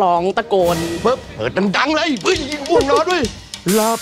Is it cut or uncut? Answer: cut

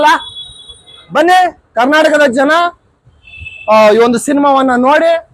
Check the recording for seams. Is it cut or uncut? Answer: uncut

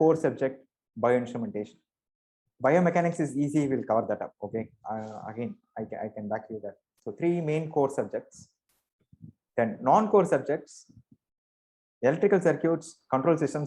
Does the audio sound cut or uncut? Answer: uncut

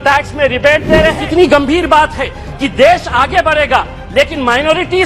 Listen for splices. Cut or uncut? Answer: cut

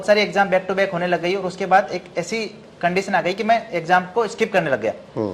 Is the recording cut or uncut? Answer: uncut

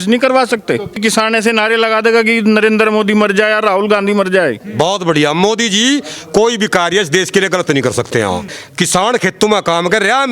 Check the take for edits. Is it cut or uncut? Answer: cut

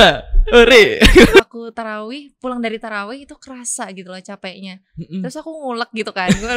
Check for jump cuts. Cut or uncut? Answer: cut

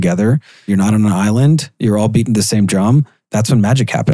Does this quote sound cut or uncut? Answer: cut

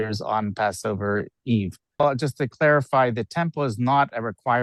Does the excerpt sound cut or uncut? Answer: uncut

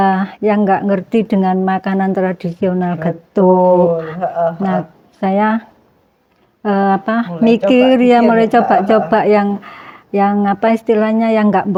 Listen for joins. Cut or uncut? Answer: uncut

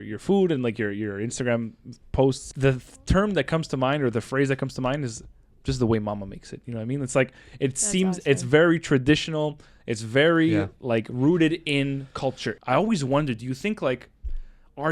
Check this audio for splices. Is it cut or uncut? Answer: cut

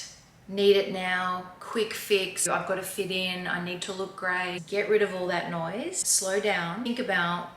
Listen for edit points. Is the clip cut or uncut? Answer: cut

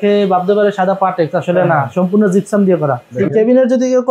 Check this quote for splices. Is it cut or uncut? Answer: cut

